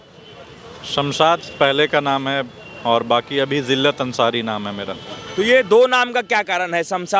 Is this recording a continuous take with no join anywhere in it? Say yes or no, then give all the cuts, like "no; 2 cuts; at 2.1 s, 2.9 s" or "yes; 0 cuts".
yes; 0 cuts